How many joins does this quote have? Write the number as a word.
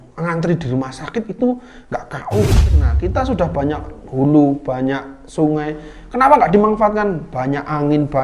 one